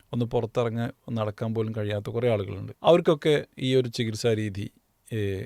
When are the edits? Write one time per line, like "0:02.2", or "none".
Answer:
0:02.6